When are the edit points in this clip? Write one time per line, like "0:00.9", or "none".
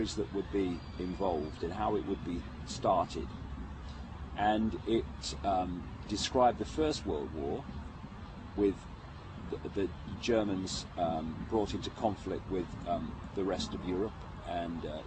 0:05.4